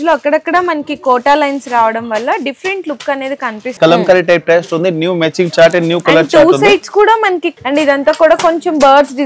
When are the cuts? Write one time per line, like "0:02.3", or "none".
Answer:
0:03.7
0:07.5